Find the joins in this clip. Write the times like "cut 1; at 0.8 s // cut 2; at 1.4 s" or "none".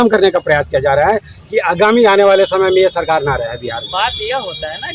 none